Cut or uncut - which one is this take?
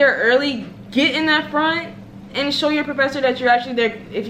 uncut